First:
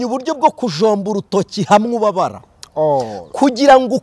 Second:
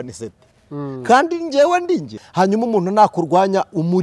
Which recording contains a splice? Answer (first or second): second